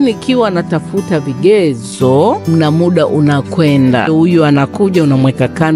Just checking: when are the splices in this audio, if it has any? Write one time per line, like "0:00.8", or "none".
0:02.5
0:04.1